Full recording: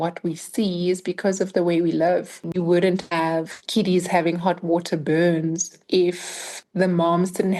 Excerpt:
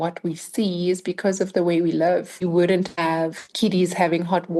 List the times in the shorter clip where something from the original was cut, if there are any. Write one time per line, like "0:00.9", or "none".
0:02.3